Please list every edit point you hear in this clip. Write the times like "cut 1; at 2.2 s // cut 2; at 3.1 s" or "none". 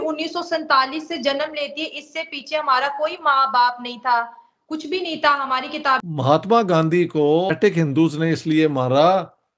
cut 1; at 6.0 s // cut 2; at 7.5 s